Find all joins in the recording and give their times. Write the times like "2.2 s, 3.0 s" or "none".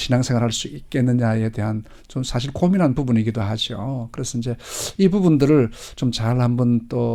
none

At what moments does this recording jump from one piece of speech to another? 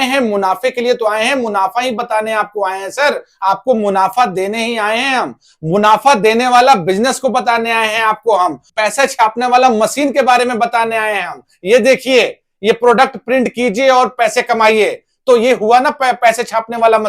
8.6 s

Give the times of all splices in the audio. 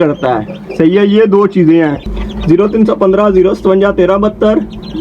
2.3 s

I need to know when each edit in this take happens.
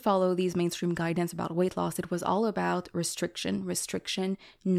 none

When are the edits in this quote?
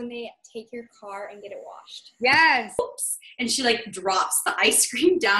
2.8 s

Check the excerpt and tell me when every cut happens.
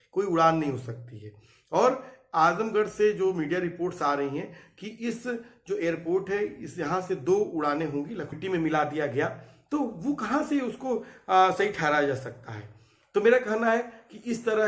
8.4 s

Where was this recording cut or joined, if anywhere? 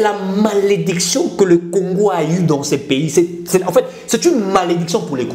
none

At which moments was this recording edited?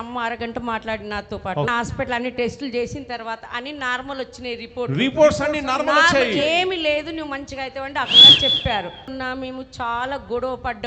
1.7 s, 9.1 s

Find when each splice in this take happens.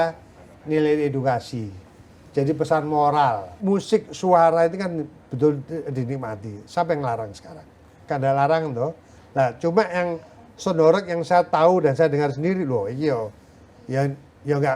3.5 s

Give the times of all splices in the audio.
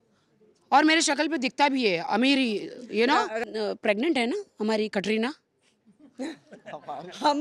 3.4 s

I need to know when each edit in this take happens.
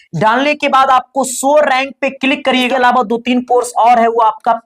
2.7 s

